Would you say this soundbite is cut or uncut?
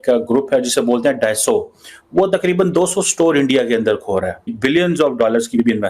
cut